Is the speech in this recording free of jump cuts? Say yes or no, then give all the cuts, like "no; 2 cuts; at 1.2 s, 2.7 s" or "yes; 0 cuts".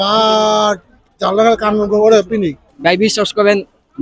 no; 1 cut; at 2.7 s